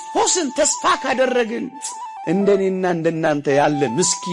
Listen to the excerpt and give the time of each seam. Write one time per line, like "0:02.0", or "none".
none